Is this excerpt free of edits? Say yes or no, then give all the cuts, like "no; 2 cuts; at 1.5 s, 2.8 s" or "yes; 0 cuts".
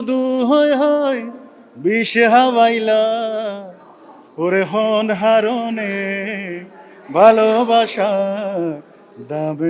yes; 0 cuts